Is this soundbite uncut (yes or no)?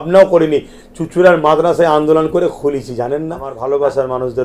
no